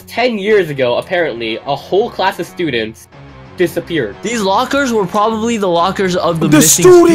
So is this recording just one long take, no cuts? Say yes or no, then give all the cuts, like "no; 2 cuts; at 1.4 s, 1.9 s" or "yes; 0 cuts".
no; 1 cut; at 4.2 s